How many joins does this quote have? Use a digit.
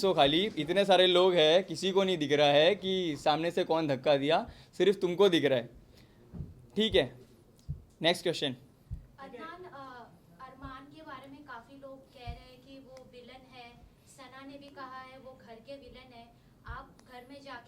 0